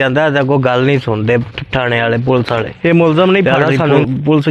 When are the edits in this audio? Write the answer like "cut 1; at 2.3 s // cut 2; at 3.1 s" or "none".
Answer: cut 1; at 2.7 s